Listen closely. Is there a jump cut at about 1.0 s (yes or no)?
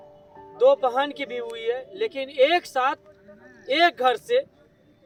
no